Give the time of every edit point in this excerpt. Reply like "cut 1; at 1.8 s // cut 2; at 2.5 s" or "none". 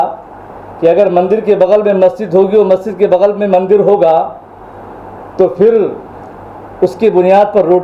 none